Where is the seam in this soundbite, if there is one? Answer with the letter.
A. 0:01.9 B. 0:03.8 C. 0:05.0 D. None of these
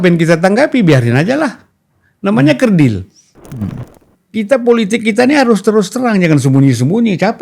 B